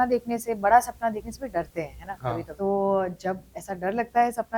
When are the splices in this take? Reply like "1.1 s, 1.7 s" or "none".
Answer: none